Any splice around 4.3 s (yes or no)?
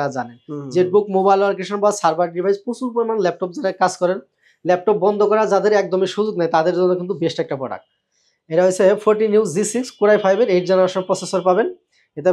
no